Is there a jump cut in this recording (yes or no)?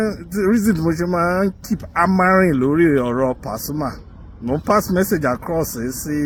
no